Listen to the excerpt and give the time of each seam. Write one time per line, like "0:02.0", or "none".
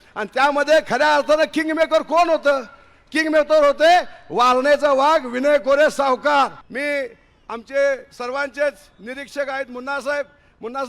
0:06.7